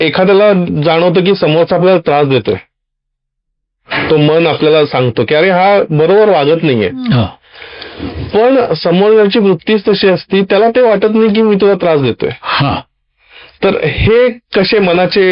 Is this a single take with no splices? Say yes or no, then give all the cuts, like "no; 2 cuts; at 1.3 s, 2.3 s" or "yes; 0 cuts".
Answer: yes; 0 cuts